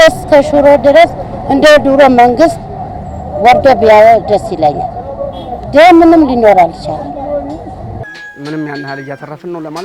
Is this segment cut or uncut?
cut